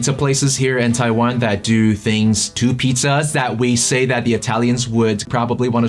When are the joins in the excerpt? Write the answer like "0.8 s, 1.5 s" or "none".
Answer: none